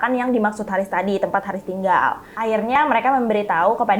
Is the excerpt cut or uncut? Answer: cut